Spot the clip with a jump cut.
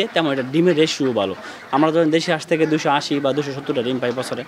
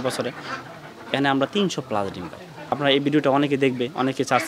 second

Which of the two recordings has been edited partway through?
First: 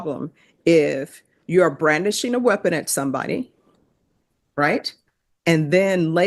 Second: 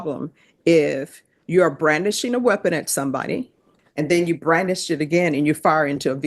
second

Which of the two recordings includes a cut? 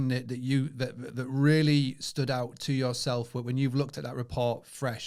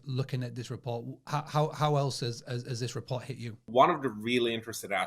second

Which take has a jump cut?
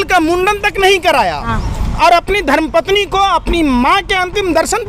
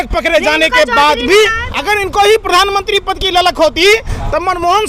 second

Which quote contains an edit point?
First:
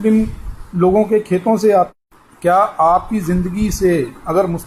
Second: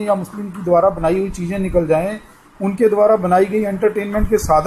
first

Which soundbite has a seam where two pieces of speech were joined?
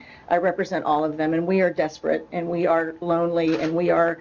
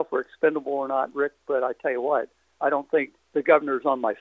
second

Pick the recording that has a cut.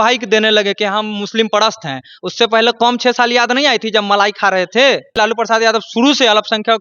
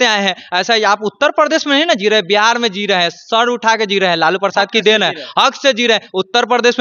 first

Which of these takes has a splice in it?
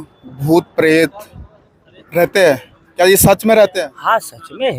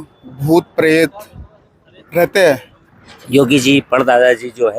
second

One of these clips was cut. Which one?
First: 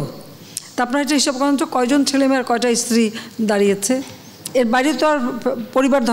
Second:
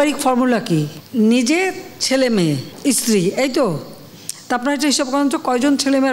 second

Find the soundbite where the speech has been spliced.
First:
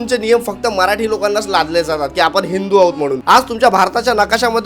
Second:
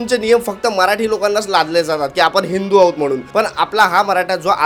first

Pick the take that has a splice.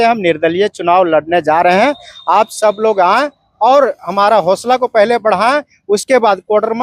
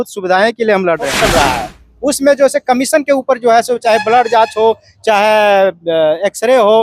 second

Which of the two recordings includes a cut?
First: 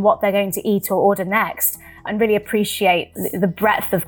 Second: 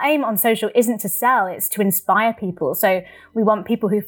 first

